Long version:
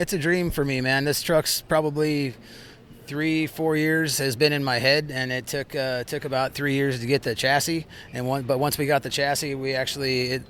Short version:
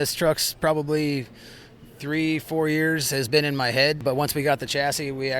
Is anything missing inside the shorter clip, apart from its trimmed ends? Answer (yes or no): yes